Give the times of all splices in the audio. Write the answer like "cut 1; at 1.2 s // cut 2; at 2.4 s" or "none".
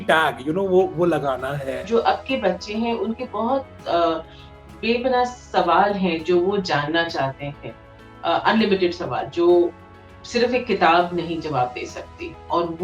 cut 1; at 1.8 s